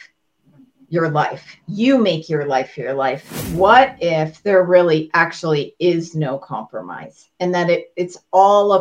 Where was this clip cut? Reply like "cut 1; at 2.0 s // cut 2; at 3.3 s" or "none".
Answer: cut 1; at 3.4 s